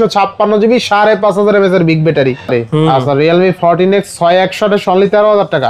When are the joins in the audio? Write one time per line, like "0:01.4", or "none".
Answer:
0:02.5